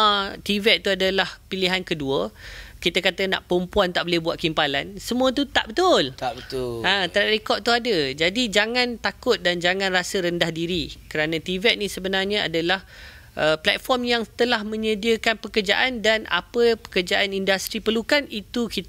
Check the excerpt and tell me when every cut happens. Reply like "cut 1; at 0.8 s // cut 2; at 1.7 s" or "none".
none